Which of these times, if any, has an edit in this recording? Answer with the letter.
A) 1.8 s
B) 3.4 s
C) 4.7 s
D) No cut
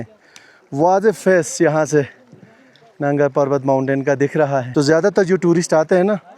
C